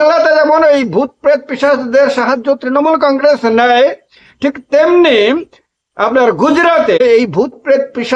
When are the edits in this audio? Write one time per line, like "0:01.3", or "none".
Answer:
0:07.0